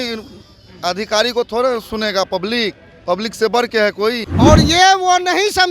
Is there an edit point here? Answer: yes; 1 cut; at 4.3 s

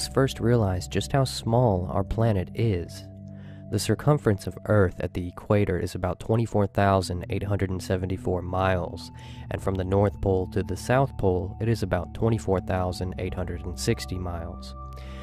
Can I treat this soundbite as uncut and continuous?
no; 1 cut; at 3.8 s

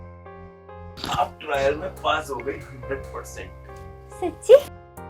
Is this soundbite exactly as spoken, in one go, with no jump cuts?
no; 1 cut; at 0.9 s

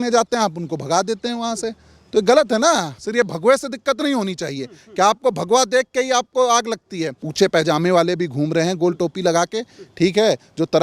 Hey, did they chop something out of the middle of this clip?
yes; 2 cuts; at 2.9 s, 7.2 s

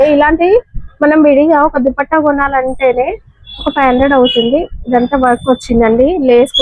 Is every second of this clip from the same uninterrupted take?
yes; 0 cuts

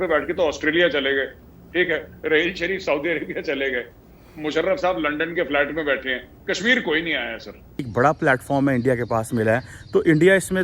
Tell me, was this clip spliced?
yes; 1 cut; at 7.7 s

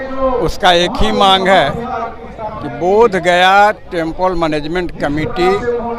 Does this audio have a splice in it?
no; 0 cuts

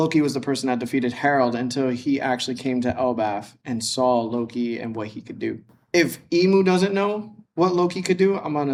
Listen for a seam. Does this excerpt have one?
no; 0 cuts

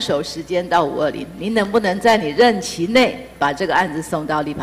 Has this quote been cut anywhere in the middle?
no; 0 cuts

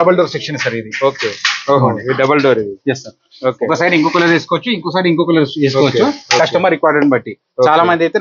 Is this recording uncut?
yes; 0 cuts

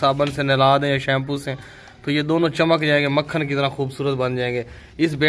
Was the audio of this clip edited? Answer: no; 0 cuts

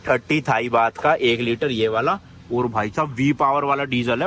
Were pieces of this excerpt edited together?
no; 0 cuts

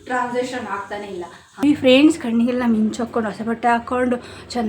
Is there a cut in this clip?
yes; 1 cut; at 1.6 s

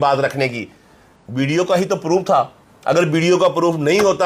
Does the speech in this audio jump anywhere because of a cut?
yes; 1 cut; at 1.2 s

